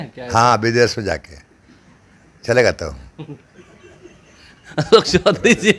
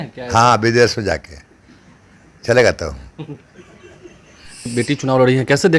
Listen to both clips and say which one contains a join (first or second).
second